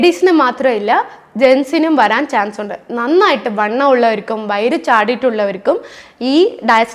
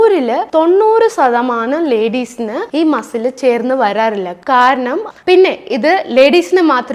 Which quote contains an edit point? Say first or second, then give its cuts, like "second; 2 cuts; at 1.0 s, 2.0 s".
second; 1 cut; at 5.1 s